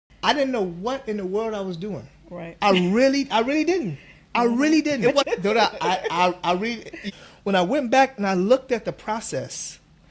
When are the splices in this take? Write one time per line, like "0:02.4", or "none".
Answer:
0:05.0
0:07.0